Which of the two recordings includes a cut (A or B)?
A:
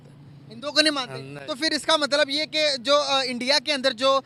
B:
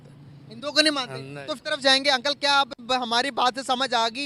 B